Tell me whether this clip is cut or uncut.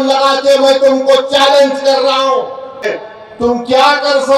cut